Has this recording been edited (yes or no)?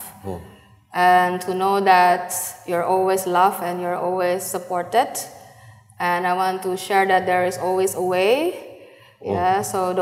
no